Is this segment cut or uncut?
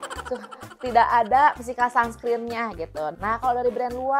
cut